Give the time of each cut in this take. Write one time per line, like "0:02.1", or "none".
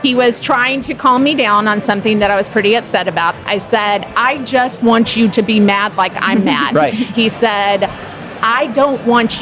0:03.4
0:07.1